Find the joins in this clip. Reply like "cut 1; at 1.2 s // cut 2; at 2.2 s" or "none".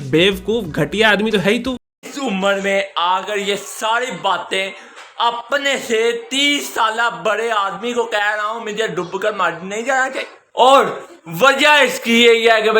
cut 1; at 1.6 s // cut 2; at 10.4 s